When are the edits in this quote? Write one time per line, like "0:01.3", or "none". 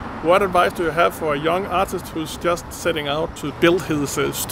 0:03.5